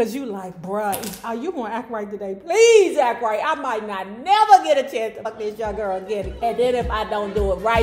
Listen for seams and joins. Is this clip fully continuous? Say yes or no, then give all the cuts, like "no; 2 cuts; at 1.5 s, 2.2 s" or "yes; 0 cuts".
no; 1 cut; at 5.2 s